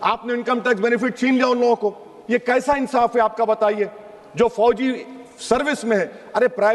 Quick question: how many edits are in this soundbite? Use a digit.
0